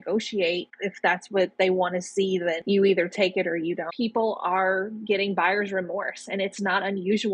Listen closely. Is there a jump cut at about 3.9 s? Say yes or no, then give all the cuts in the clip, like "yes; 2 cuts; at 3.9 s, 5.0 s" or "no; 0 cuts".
yes; 1 cut; at 3.9 s